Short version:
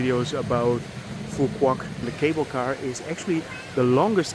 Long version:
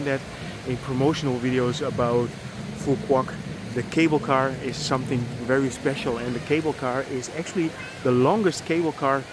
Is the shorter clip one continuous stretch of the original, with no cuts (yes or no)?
no